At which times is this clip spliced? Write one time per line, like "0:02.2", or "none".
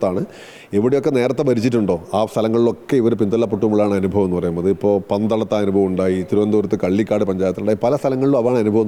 none